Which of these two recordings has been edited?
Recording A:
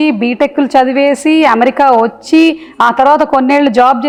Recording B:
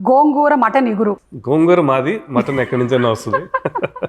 B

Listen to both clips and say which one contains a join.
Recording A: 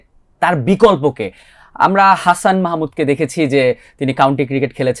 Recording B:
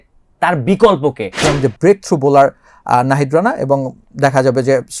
B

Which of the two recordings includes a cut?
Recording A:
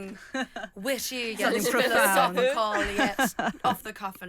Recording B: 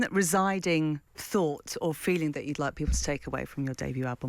B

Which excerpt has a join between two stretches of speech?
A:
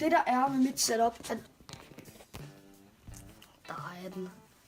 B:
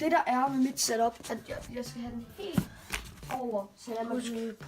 B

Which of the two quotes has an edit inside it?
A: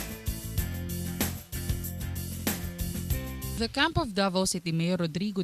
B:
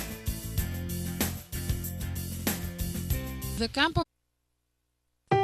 A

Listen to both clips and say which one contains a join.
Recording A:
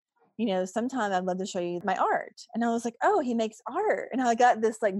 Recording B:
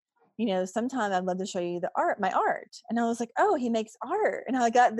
A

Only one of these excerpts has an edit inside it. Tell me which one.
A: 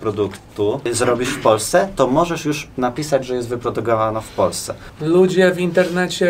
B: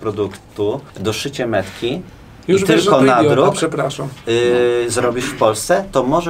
A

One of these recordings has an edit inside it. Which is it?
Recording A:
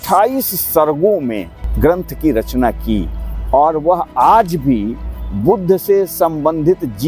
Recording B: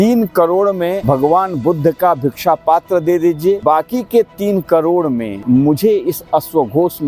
B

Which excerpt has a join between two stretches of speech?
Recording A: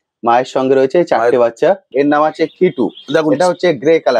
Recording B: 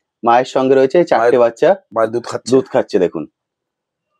A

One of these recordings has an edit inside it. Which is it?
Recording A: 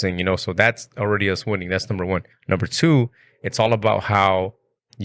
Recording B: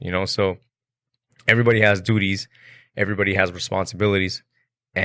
A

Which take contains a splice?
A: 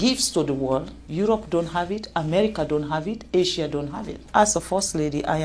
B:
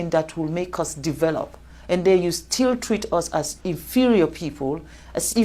A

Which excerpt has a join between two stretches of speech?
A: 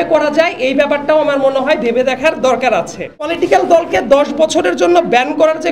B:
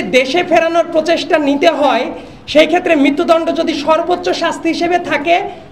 A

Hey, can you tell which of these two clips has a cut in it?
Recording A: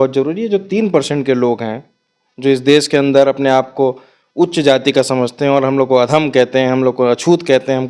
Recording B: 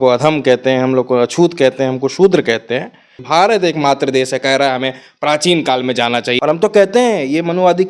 B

